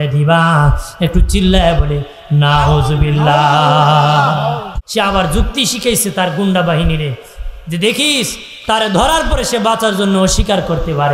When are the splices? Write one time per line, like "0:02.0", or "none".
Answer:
0:04.7